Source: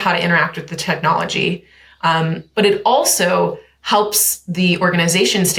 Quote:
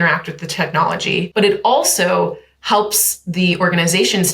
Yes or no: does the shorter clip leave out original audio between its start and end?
yes